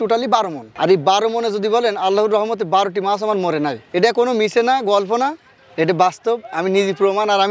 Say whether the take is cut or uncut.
uncut